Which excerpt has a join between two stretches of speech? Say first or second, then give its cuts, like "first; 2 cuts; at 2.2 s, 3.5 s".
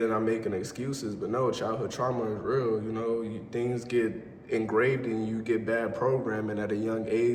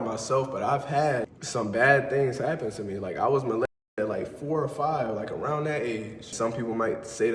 second; 2 cuts; at 1.3 s, 6.3 s